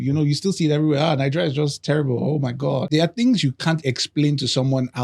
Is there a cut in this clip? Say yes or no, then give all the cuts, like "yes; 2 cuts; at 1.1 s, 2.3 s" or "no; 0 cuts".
yes; 1 cut; at 2.9 s